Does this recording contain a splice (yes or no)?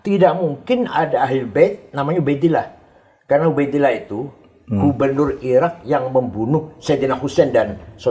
no